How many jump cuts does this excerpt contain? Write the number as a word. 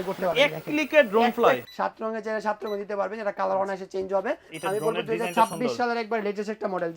two